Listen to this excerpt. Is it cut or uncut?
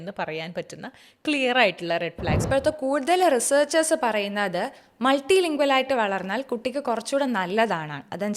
cut